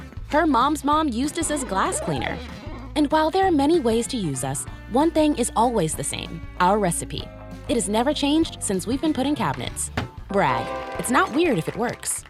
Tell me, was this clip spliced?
no; 0 cuts

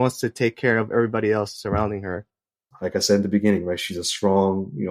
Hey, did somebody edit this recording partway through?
yes; 1 cut; at 2.4 s

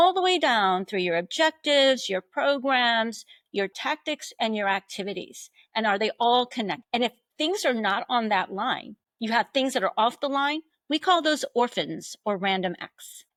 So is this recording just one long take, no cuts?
yes; 0 cuts

